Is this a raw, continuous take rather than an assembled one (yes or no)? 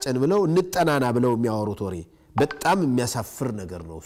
yes